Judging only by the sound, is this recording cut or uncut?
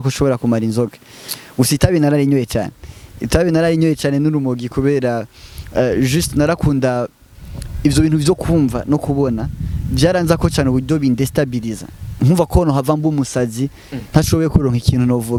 uncut